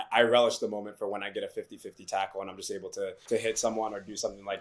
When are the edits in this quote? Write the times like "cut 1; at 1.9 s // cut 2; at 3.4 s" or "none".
cut 1; at 3.2 s